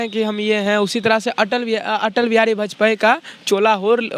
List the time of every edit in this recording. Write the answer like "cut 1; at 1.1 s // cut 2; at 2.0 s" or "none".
none